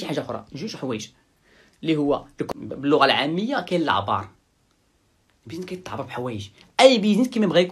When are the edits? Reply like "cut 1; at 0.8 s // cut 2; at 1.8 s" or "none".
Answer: cut 1; at 2.5 s